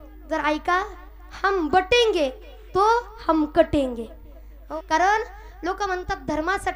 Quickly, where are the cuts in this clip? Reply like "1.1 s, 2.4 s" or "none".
4.6 s